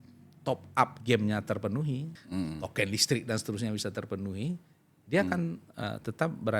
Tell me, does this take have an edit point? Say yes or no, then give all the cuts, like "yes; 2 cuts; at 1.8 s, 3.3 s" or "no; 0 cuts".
yes; 1 cut; at 2.1 s